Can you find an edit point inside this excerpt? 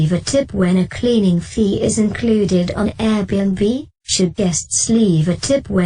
yes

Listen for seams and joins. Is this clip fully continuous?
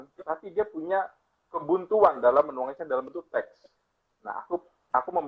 yes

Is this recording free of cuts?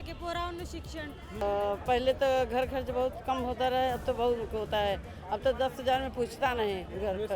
no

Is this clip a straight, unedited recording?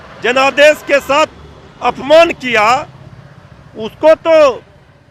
yes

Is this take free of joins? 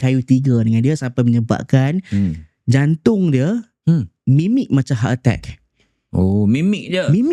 yes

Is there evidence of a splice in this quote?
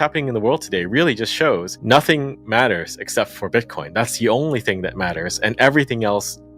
yes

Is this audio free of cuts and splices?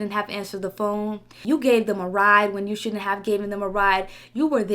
no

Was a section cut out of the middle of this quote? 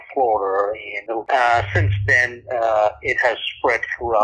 yes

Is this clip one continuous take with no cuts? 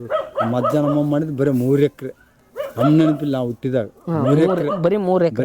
yes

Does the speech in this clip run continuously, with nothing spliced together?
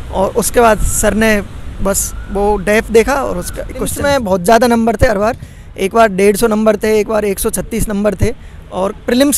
no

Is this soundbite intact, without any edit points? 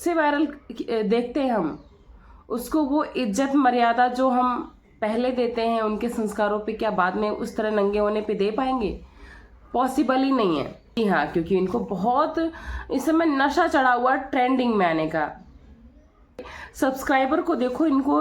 no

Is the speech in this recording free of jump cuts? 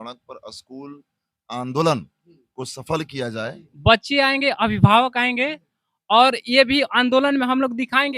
no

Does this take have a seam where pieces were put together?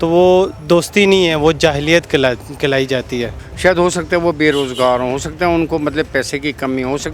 yes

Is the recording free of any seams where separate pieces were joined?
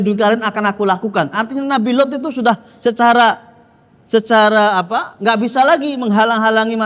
yes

